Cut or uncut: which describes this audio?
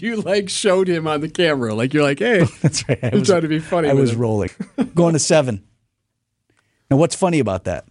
cut